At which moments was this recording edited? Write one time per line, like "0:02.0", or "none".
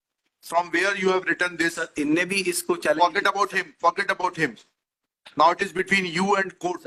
none